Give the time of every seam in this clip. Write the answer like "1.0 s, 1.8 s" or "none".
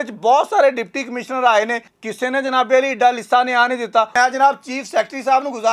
1.9 s, 4.1 s